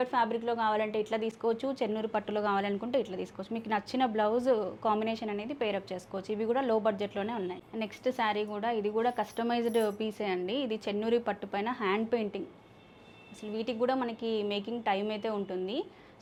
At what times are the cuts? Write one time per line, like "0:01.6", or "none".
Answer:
none